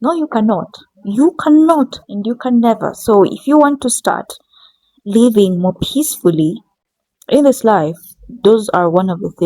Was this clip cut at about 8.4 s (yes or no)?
no